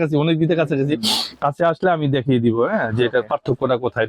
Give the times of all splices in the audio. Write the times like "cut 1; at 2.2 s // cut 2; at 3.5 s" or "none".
none

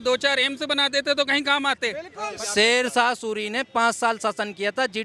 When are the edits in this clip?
cut 1; at 2.2 s

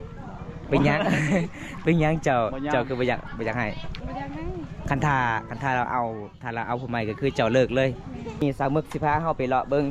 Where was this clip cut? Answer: cut 1; at 8.4 s

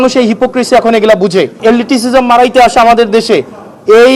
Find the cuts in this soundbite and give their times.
cut 1; at 1.6 s

